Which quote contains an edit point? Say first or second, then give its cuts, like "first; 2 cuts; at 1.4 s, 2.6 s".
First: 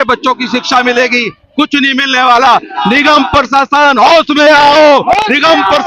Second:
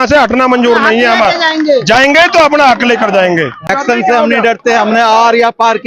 second; 1 cut; at 3.7 s